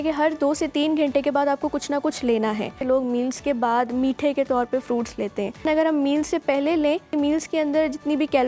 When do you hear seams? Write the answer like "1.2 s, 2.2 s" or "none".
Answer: 2.8 s, 5.6 s, 7.1 s